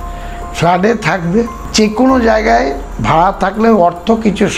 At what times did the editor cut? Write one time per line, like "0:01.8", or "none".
0:01.6